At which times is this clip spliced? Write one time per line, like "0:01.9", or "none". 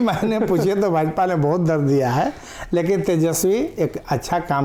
none